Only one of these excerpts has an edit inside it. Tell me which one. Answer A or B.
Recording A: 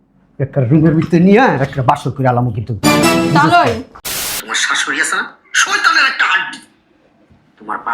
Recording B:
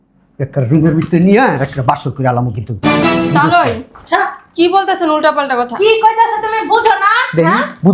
A